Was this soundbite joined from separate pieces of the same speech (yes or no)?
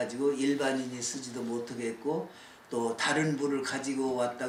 no